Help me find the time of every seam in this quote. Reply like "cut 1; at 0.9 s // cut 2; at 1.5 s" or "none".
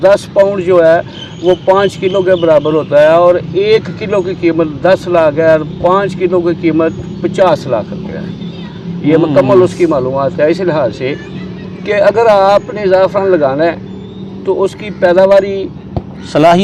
none

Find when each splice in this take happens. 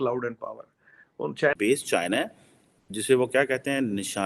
cut 1; at 1.5 s

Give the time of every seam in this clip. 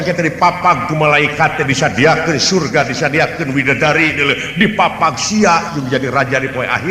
none

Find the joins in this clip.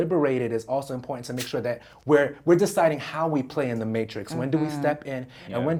none

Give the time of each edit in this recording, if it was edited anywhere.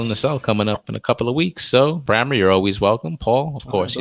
cut 1; at 2.0 s

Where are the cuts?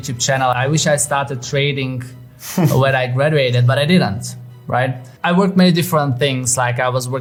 none

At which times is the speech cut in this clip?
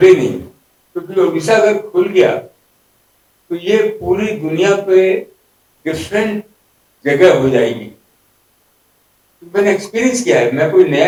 none

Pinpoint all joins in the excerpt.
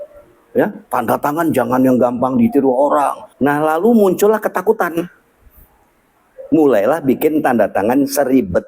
cut 1; at 3.2 s

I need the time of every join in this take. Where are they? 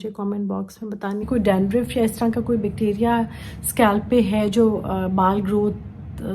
cut 1; at 1.2 s

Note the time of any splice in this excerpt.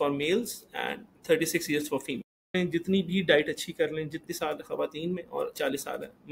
cut 1; at 2.5 s // cut 2; at 4.2 s

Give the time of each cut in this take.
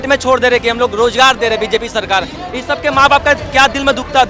none

